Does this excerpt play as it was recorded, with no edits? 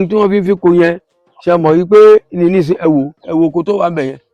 yes; 0 cuts

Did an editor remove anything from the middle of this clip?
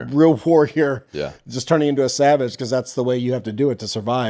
no; 0 cuts

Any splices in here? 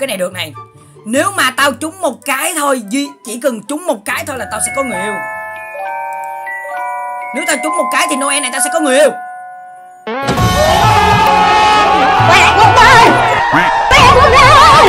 no; 0 cuts

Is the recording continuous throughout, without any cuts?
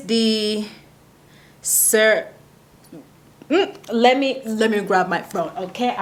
yes; 0 cuts

